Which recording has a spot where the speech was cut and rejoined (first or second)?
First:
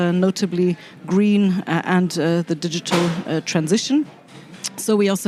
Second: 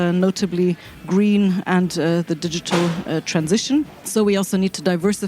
second